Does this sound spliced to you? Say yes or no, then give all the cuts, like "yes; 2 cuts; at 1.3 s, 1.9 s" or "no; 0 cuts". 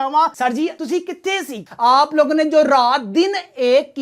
yes; 1 cut; at 1.6 s